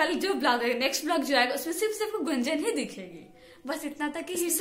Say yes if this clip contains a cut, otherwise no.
no